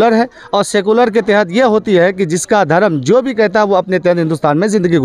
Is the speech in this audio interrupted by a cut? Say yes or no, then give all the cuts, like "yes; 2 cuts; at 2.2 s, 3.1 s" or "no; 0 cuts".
no; 0 cuts